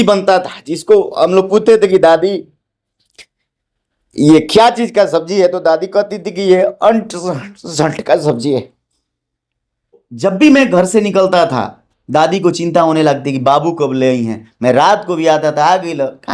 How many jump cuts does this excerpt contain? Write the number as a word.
one